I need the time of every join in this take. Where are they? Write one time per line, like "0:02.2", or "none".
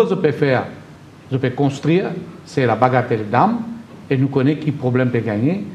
none